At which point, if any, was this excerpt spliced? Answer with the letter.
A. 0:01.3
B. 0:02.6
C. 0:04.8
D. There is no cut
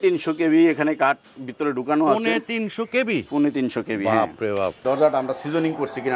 C